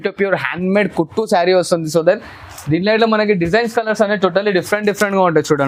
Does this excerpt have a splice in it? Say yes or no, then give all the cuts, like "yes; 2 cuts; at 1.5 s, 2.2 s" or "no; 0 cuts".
no; 0 cuts